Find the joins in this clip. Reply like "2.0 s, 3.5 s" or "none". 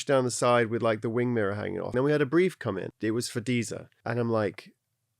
1.9 s, 2.9 s, 3.9 s